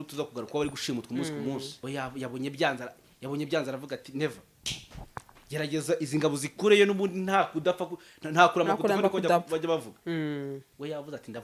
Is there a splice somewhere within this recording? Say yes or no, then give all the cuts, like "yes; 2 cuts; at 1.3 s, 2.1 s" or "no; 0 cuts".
yes; 1 cut; at 1.8 s